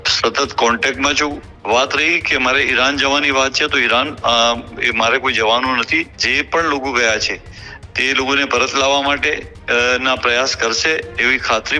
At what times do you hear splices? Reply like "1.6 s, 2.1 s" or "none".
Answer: 1.5 s, 6.2 s